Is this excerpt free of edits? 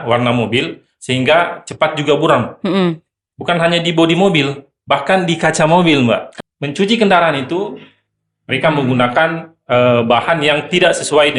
no; 1 cut; at 6.3 s

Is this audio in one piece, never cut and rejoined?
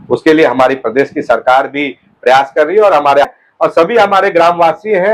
no; 1 cut; at 3.2 s

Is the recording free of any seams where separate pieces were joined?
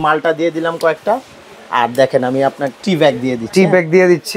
no; 1 cut; at 2.7 s

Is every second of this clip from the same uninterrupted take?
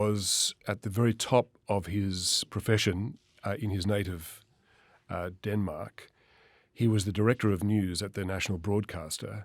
yes; 0 cuts

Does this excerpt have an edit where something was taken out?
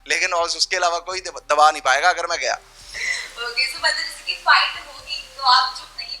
no; 0 cuts

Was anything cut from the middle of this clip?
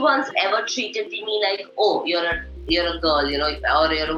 no; 0 cuts

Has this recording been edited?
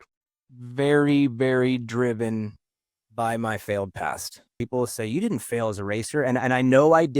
yes; 1 cut; at 4.5 s

